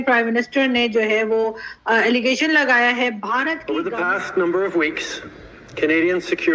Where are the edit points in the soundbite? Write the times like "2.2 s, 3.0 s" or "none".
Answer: 3.6 s

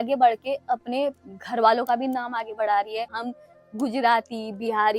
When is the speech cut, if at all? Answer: 3.1 s

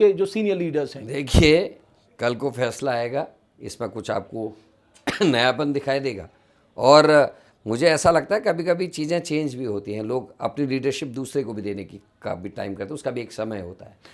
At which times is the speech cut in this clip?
none

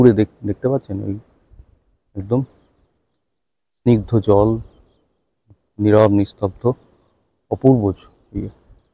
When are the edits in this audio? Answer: none

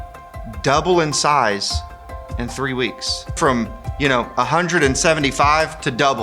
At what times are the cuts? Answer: 3.4 s

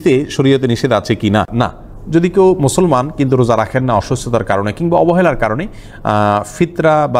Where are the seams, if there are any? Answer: none

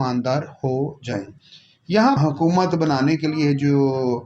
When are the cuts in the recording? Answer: 2.2 s

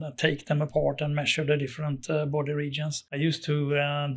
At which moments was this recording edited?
3.2 s

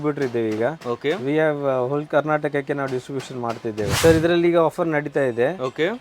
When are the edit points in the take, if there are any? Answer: 4.0 s

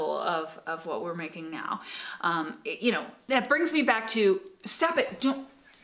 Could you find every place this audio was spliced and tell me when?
3.1 s

